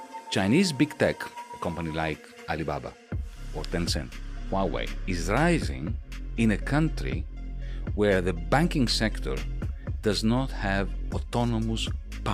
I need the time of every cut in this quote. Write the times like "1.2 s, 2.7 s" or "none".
none